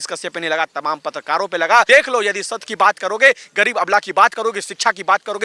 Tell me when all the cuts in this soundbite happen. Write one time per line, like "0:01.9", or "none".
0:01.9